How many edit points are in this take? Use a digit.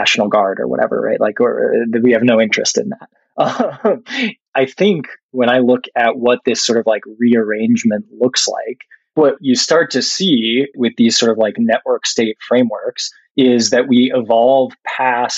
3